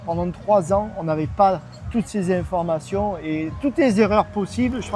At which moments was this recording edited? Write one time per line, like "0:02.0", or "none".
none

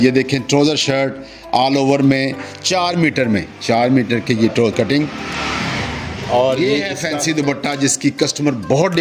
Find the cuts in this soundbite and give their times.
0:06.9

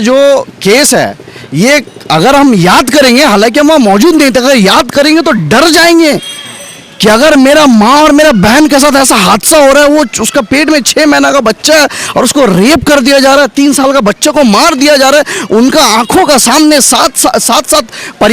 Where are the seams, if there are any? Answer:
none

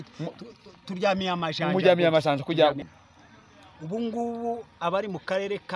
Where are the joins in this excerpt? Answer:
0:02.9

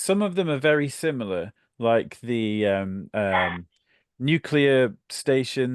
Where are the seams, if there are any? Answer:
none

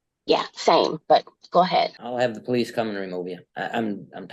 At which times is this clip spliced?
0:01.0
0:02.0
0:03.4

